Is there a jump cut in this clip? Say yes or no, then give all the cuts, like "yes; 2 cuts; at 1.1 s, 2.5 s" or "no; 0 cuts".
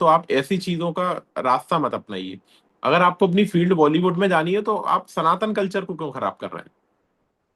no; 0 cuts